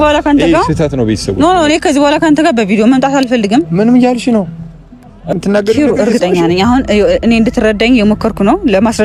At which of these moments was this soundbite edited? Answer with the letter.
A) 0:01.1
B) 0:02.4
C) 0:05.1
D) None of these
D